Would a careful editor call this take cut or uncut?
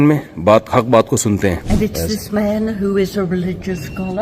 cut